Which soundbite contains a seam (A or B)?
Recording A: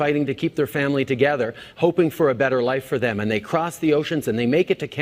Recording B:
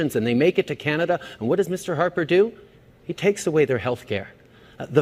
A